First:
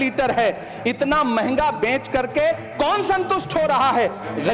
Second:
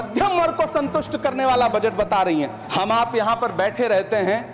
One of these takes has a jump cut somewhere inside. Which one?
second; 1 cut; at 2.6 s

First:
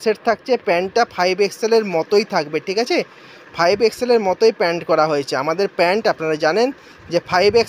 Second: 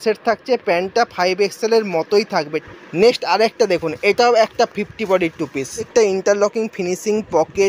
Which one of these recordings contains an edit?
second; 2 cuts; at 2.6 s, 5.9 s

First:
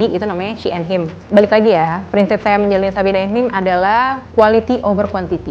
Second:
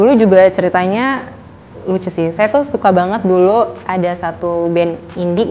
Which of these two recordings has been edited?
first; 2 cuts; at 1.1 s, 4.2 s

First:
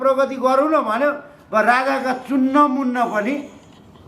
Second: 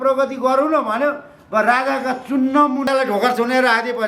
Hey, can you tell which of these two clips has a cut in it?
second; 1 cut; at 2.9 s

